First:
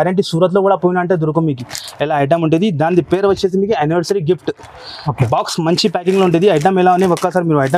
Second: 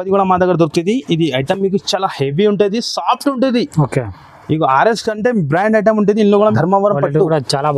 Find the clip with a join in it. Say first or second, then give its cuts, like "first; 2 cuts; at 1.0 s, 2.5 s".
second; 1 cut; at 6.4 s